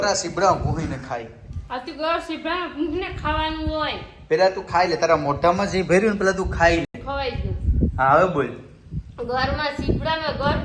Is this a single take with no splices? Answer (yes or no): yes